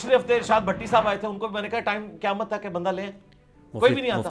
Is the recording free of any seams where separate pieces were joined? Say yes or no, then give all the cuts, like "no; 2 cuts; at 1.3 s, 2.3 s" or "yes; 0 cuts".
yes; 0 cuts